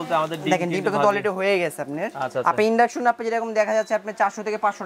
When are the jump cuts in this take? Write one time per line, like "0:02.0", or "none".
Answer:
0:02.3